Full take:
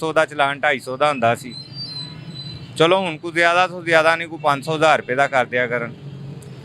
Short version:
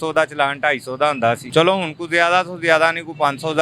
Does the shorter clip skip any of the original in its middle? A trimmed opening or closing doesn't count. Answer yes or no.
yes